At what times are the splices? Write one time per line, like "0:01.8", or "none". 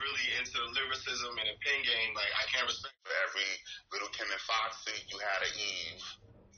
0:02.8